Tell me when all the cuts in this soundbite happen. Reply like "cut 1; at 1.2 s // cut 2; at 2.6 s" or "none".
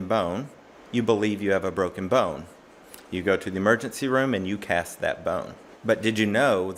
none

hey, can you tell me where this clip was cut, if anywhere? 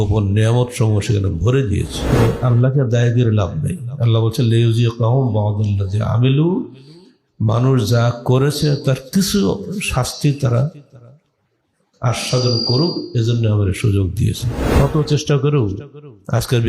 cut 1; at 2.0 s // cut 2; at 14.5 s

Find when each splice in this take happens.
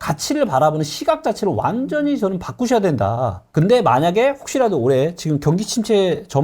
cut 1; at 3.5 s

